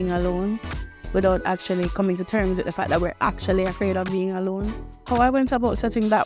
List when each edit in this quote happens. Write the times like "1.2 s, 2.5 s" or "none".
5.0 s